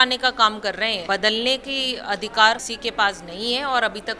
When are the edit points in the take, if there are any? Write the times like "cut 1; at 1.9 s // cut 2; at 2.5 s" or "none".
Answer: cut 1; at 1.0 s // cut 2; at 2.7 s